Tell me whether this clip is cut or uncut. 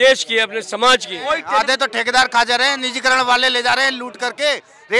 cut